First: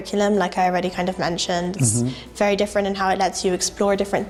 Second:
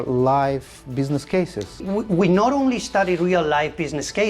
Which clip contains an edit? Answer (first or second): second